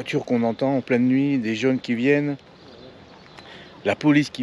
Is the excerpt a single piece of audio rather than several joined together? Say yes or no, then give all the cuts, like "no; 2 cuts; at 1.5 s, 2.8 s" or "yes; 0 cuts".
yes; 0 cuts